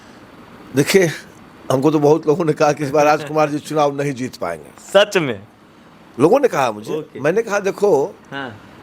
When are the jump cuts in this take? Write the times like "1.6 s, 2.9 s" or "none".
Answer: none